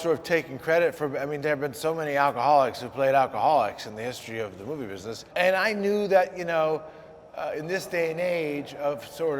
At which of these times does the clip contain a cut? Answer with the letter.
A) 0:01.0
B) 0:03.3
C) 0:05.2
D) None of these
C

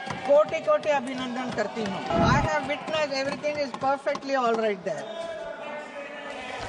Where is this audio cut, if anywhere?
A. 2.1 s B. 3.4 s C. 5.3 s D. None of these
A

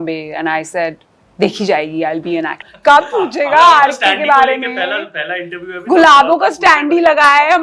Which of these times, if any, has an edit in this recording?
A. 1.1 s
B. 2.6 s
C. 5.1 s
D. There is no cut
B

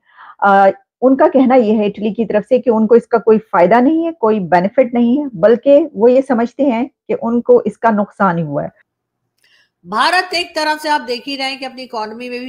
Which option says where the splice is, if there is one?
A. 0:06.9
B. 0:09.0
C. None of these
B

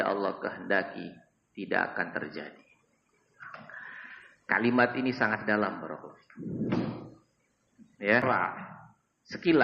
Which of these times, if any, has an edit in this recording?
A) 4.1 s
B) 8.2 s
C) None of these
B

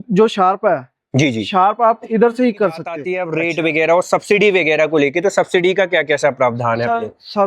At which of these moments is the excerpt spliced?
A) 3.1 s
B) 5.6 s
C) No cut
A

